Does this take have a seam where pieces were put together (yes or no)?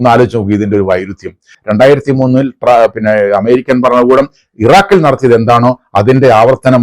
yes